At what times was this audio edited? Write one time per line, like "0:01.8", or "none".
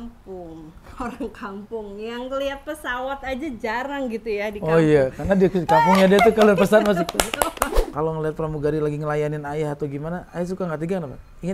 0:07.8